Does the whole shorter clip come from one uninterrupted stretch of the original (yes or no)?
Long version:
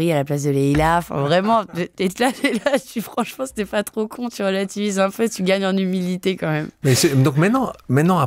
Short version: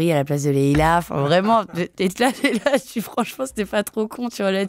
yes